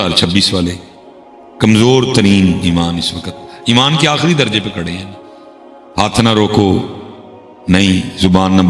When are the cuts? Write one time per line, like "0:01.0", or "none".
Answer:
none